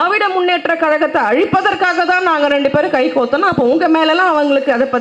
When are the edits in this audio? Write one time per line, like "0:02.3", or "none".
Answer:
none

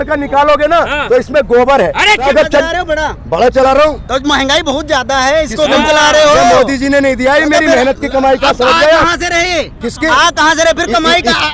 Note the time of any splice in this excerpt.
0:02.2

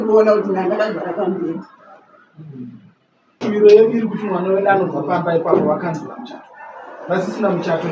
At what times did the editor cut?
0:03.4

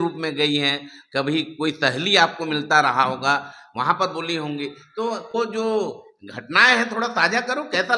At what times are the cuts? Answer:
none

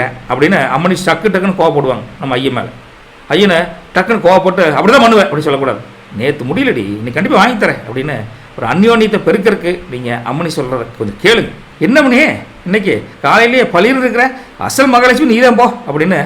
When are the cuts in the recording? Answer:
0:11.6

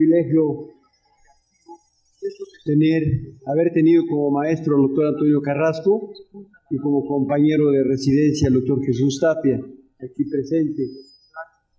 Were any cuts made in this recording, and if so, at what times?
0:04.7

